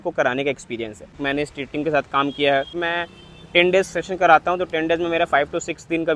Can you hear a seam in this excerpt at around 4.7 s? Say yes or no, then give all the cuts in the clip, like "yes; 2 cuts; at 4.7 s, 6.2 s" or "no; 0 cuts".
no; 2 cuts; at 1.2 s, 2.7 s